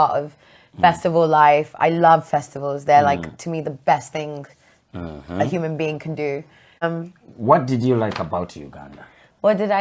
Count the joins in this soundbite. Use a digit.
1